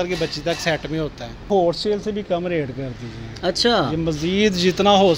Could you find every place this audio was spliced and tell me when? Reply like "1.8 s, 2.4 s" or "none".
1.5 s